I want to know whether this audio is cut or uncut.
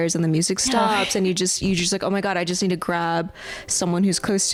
uncut